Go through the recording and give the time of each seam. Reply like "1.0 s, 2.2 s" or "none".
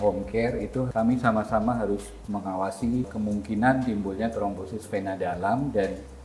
0.9 s, 3.1 s